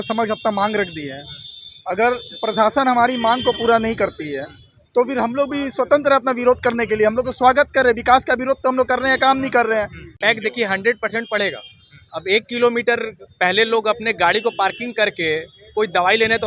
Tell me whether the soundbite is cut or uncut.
cut